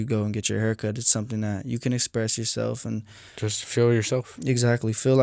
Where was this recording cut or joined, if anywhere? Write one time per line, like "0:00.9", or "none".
none